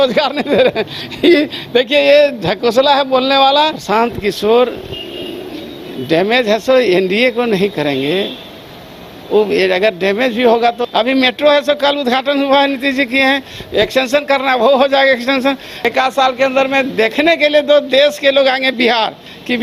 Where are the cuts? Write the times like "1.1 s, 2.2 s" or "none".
3.8 s, 10.8 s, 15.7 s